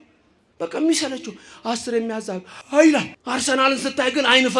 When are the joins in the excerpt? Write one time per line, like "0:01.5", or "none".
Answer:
0:02.5
0:03.2